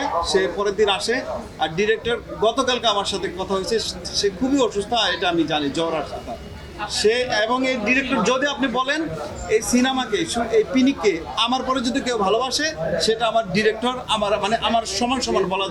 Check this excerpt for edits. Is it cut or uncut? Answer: uncut